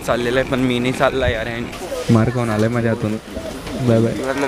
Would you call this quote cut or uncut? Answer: cut